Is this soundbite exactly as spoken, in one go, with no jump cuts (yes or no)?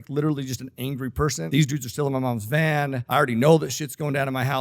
no